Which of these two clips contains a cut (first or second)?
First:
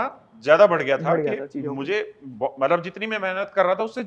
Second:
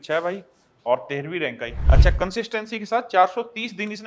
second